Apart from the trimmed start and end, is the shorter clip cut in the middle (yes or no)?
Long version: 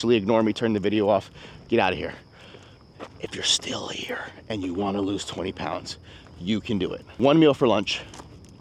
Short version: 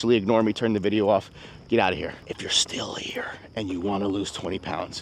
yes